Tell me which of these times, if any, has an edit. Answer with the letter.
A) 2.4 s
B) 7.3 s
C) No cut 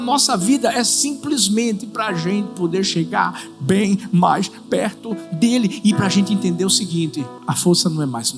B